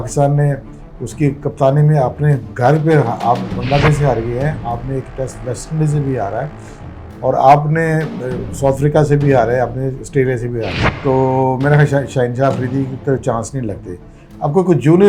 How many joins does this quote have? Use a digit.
1